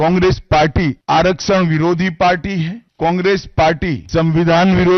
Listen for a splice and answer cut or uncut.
cut